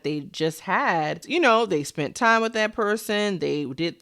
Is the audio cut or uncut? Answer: cut